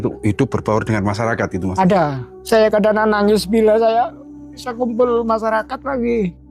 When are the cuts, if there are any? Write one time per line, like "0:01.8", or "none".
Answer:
0:02.3